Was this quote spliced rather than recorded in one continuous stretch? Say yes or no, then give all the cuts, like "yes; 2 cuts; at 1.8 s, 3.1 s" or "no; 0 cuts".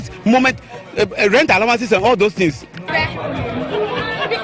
yes; 1 cut; at 2.7 s